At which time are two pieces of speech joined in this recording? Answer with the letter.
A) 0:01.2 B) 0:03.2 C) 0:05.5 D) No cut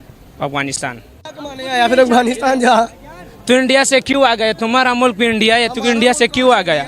A